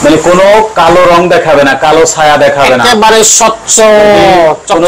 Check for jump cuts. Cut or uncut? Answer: uncut